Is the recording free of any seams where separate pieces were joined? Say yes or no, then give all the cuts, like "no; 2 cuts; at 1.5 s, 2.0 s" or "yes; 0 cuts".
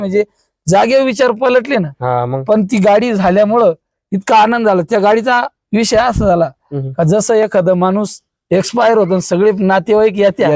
yes; 0 cuts